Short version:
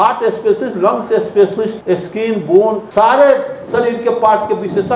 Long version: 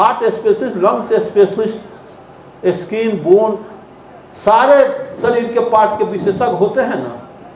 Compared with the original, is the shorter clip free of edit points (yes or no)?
no